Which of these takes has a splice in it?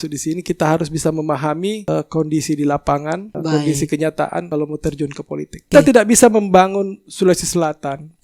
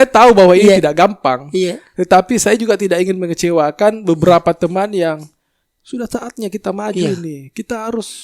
first; 4 cuts; at 1.8 s, 3.3 s, 4.5 s, 5.7 s

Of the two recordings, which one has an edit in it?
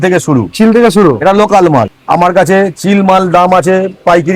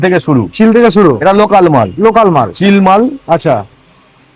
first; 1 cut; at 1.9 s

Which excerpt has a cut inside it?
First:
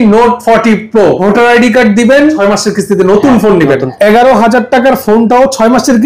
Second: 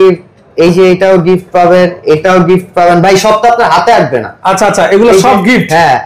first; 3 cuts; at 1.2 s, 2.4 s, 3.9 s

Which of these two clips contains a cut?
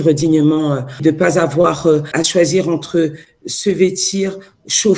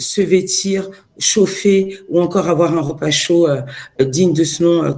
first; 2 cuts; at 1.0 s, 2.1 s

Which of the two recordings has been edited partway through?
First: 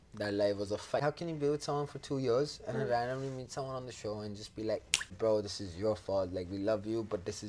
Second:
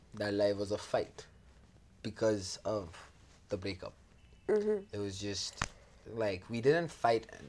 first; 2 cuts; at 1.0 s, 5.1 s

